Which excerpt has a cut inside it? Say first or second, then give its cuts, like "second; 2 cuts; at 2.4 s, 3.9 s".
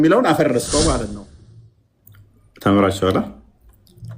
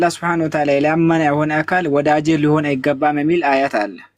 first; 1 cut; at 1.0 s